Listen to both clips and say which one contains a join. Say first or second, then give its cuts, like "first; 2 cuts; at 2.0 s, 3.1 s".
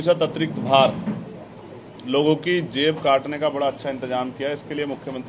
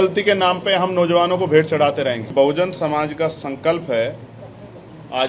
second; 1 cut; at 2.3 s